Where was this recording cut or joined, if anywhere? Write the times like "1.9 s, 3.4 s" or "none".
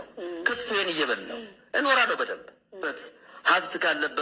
none